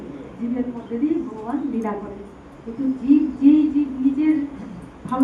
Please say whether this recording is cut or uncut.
uncut